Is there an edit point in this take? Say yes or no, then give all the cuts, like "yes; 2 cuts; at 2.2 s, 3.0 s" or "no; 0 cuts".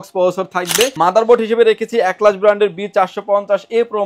yes; 1 cut; at 0.9 s